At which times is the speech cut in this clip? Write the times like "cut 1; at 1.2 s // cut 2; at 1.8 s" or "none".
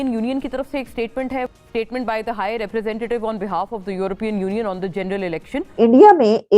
cut 1; at 1.5 s // cut 2; at 5.7 s

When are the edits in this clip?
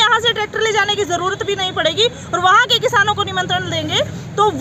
none

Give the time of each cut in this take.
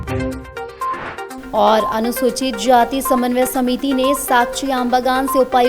cut 1; at 1.3 s

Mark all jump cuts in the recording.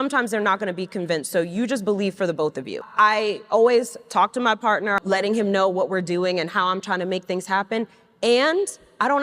cut 1; at 2.9 s // cut 2; at 5.0 s

